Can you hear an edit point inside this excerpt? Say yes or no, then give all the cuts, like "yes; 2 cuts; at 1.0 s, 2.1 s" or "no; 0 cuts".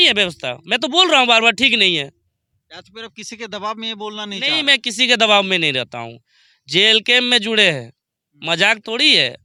no; 0 cuts